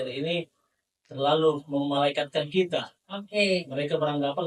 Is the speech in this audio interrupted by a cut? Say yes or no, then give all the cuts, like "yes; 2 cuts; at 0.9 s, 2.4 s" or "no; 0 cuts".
no; 0 cuts